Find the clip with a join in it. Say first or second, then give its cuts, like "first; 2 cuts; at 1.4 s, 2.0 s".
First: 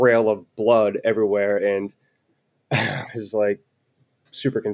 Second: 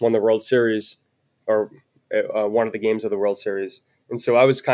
second; 1 cut; at 1.2 s